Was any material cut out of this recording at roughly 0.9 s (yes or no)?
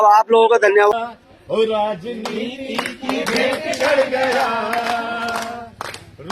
yes